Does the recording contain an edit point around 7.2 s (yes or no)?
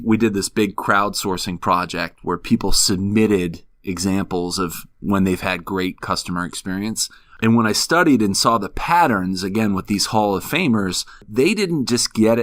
yes